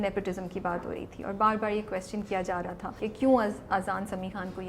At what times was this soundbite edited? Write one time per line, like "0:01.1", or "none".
0:03.0